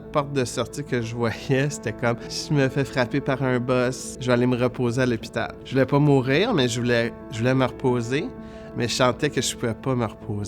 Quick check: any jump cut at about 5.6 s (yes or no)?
yes